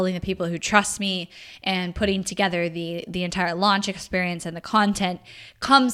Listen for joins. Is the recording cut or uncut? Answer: uncut